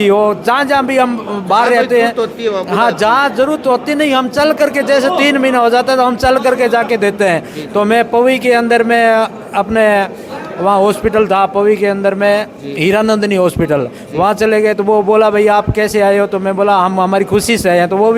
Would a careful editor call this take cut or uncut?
uncut